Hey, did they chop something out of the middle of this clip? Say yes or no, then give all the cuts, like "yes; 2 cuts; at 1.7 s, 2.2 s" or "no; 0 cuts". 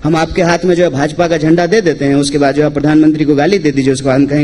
no; 0 cuts